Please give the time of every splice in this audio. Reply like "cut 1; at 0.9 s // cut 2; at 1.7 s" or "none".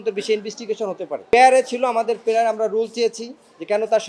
cut 1; at 1.3 s